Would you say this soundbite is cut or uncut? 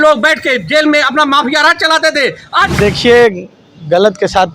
cut